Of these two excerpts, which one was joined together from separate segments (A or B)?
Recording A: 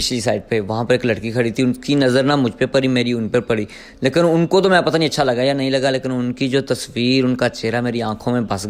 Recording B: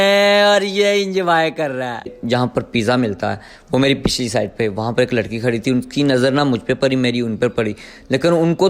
B